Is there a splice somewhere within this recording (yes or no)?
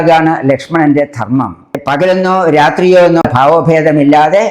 yes